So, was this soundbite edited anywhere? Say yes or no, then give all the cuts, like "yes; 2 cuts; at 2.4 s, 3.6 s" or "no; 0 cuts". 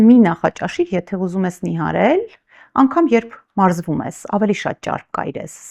no; 0 cuts